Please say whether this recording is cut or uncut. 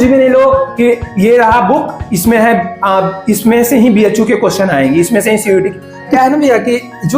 cut